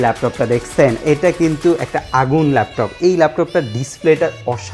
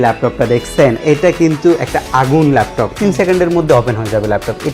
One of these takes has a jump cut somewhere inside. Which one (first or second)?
second